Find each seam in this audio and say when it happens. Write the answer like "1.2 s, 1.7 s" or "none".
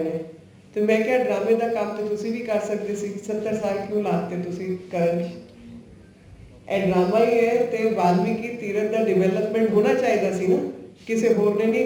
none